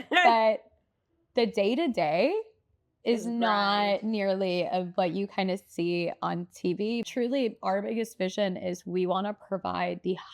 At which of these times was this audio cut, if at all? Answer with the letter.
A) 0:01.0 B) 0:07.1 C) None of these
B